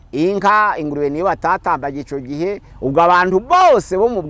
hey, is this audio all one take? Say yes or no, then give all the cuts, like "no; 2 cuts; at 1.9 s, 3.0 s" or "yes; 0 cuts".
no; 1 cut; at 2.7 s